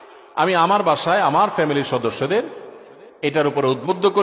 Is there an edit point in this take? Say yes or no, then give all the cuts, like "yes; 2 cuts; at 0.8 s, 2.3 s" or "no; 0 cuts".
no; 0 cuts